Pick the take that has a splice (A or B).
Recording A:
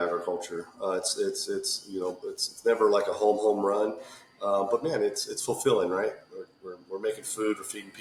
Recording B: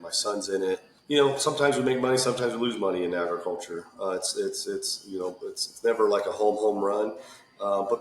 B